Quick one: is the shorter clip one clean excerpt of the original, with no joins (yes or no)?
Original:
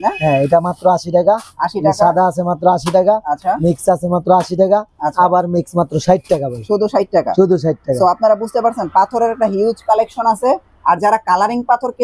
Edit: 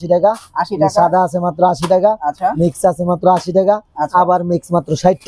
yes